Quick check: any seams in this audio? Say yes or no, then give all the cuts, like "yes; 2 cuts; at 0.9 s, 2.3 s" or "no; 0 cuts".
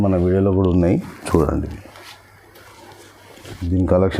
no; 0 cuts